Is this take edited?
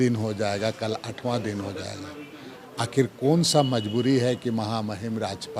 no; 0 cuts

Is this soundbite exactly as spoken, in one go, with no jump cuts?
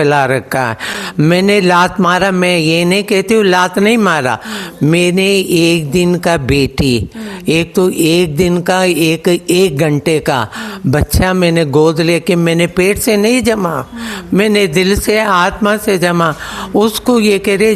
yes; 0 cuts

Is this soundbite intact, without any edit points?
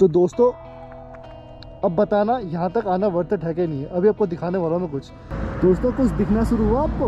no; 1 cut; at 5.3 s

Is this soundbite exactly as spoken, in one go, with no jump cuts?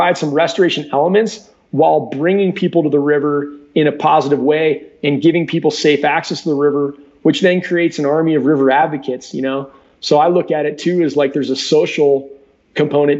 yes; 0 cuts

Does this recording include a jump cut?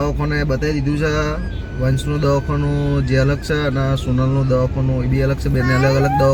no; 0 cuts

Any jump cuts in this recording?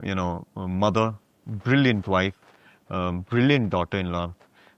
no; 0 cuts

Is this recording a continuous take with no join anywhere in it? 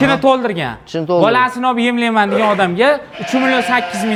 yes; 0 cuts

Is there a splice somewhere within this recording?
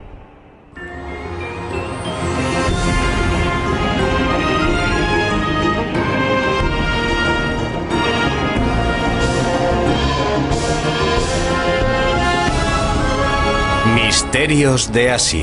yes; 1 cut; at 5.5 s

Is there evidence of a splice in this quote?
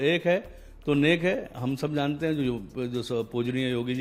no; 0 cuts

